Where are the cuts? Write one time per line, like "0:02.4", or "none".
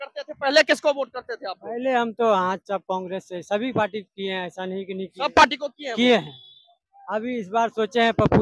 none